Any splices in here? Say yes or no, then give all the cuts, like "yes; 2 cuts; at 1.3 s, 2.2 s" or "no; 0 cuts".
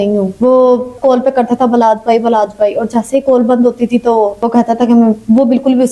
no; 0 cuts